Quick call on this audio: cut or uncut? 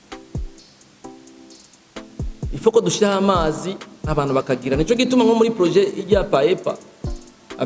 cut